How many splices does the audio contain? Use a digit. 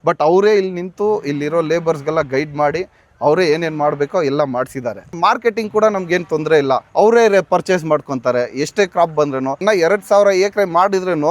3